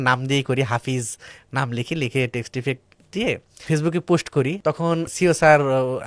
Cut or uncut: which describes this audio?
cut